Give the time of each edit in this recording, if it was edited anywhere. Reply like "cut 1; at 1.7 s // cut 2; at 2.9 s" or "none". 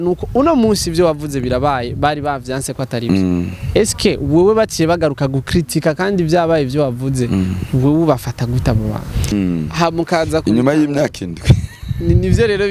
cut 1; at 9.3 s